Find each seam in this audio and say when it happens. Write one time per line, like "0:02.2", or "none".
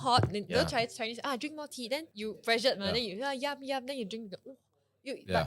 0:02.1